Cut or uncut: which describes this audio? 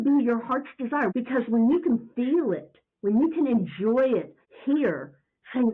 cut